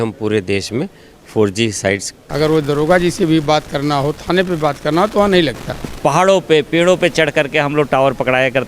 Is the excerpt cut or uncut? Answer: cut